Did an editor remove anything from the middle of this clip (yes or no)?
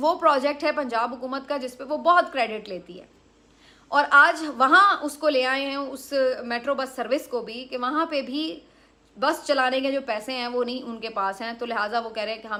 no